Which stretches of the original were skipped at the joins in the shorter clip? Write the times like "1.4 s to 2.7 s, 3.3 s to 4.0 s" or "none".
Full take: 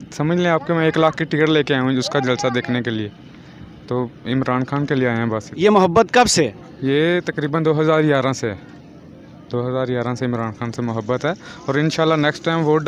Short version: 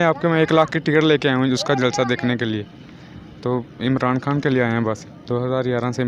5.5 s to 9.3 s